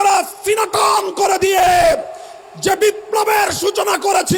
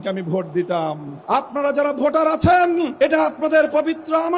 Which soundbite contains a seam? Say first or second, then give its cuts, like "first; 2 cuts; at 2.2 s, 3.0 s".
second; 2 cuts; at 1.1 s, 2.9 s